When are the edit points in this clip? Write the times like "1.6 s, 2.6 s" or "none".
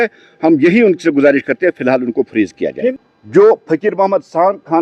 3.1 s